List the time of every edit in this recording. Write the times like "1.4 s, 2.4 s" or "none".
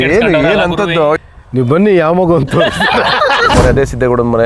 1.2 s, 3.5 s